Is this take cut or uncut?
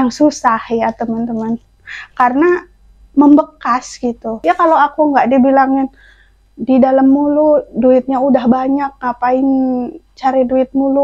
cut